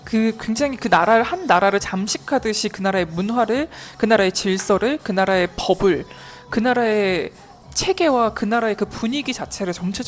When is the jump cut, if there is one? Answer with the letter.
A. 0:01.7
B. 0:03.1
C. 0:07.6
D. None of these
D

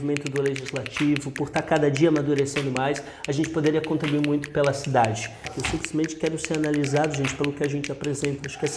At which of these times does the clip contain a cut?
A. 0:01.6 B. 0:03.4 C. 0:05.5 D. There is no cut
C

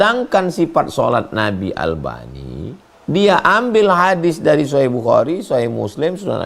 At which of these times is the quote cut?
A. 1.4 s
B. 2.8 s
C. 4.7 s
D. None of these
B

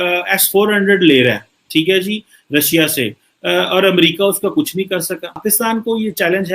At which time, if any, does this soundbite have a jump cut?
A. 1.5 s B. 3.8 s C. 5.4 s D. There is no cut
C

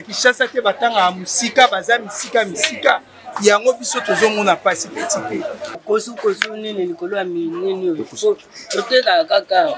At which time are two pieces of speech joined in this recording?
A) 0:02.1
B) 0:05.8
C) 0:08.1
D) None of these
B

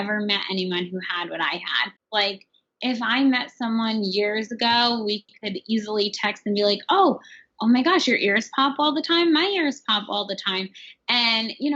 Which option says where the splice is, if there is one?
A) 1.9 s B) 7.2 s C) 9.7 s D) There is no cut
A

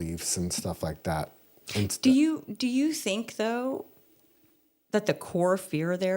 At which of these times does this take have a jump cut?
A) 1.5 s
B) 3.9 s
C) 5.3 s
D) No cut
D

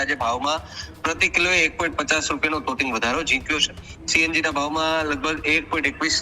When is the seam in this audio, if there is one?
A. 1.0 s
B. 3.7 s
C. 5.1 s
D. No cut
D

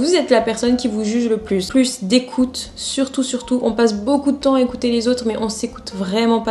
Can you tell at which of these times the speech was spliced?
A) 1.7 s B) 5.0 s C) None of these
A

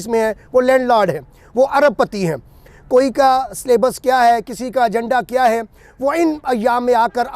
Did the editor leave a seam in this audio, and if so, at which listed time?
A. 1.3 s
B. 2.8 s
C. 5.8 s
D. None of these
D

